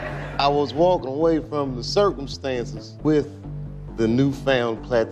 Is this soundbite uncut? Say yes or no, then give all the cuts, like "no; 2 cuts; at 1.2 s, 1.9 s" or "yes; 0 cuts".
yes; 0 cuts